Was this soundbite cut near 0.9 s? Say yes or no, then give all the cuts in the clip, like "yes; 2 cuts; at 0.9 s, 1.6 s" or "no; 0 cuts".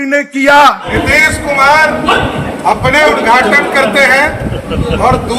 yes; 1 cut; at 0.9 s